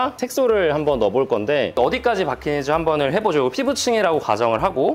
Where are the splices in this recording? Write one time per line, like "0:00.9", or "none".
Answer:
none